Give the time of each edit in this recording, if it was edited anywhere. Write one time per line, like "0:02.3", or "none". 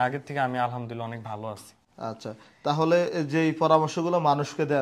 none